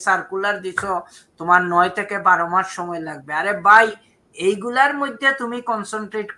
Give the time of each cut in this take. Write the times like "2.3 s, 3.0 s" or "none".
none